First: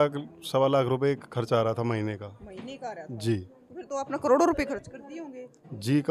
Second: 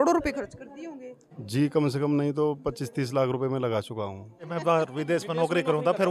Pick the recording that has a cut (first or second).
second